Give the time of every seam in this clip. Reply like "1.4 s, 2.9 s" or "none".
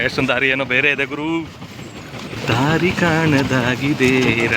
2.4 s